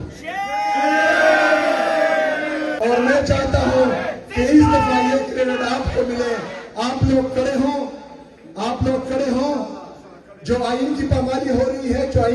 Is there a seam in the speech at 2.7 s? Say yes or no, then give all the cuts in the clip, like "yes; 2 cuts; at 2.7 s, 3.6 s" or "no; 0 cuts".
yes; 1 cut; at 2.7 s